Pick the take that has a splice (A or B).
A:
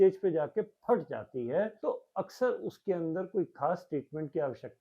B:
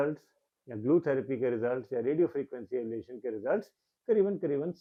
A